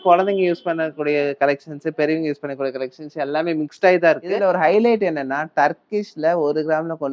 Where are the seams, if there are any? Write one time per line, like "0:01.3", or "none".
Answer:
0:04.4